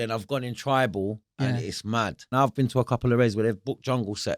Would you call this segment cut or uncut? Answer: cut